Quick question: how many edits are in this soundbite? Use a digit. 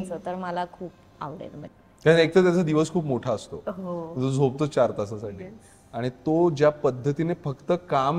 1